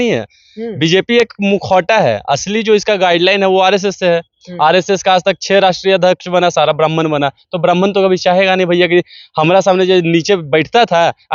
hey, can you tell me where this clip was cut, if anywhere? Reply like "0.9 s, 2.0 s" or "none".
none